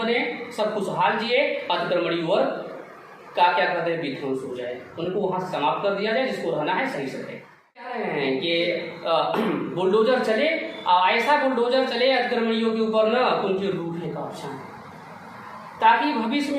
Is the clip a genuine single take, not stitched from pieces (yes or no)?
no